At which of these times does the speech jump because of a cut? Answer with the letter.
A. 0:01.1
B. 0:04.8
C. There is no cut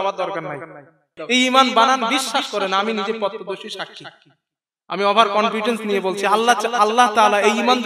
A